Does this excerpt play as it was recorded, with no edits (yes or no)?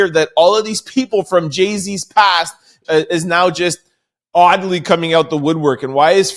no